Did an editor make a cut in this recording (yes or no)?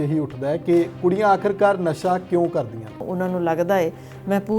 yes